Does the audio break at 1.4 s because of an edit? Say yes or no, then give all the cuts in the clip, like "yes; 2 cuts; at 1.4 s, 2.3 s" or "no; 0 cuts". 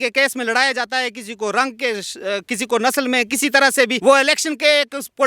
no; 1 cut; at 4.0 s